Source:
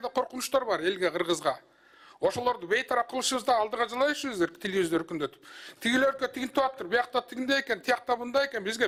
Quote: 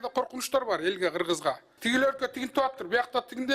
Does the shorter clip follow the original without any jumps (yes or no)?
no